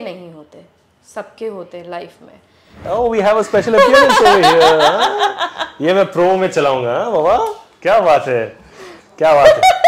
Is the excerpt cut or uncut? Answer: cut